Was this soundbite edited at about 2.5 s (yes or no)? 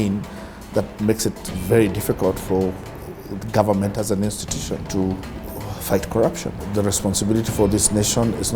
no